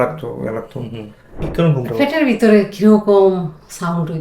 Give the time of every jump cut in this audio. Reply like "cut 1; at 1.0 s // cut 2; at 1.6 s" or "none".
cut 1; at 1.5 s